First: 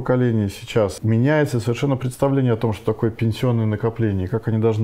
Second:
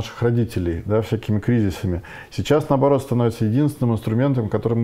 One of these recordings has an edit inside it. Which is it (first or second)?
first